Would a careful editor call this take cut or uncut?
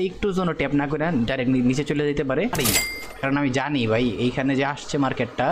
cut